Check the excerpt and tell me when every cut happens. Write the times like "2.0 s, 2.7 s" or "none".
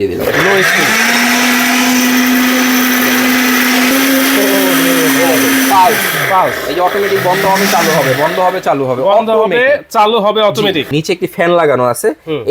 3.9 s, 10.9 s